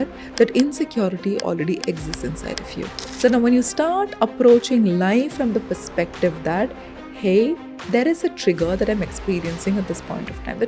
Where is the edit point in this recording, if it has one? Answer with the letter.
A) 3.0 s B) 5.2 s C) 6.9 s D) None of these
A